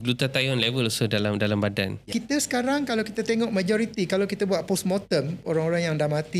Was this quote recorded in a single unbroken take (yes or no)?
no